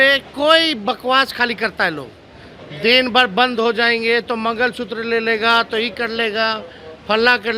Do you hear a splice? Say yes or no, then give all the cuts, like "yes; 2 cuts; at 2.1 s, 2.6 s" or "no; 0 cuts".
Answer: no; 0 cuts